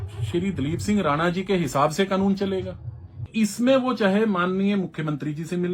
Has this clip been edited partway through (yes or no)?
yes